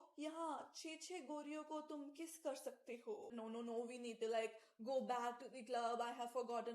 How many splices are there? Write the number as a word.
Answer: one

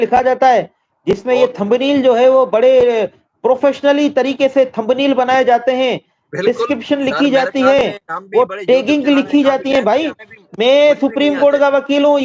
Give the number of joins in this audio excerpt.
zero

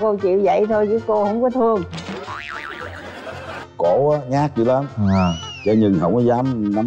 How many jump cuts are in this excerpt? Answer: two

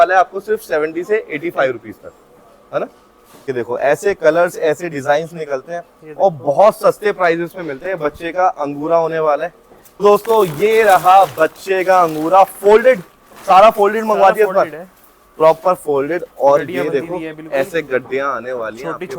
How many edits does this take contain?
two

